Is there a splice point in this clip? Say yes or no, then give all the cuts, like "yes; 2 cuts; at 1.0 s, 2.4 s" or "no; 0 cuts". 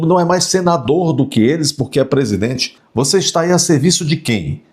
yes; 1 cut; at 2.8 s